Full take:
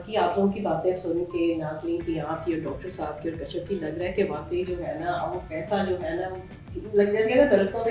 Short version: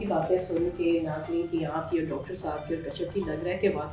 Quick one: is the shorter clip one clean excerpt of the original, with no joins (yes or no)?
yes